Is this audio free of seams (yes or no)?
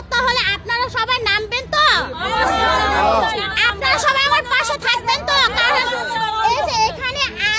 yes